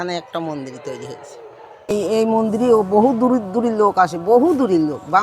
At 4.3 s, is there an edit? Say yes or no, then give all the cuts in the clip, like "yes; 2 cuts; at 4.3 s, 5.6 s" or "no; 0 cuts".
no; 1 cut; at 1.9 s